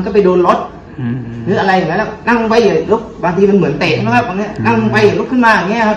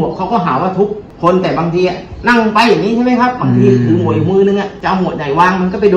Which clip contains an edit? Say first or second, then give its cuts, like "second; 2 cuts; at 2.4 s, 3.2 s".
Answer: second; 2 cuts; at 1.0 s, 4.7 s